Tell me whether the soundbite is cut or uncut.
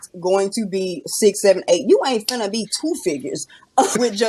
uncut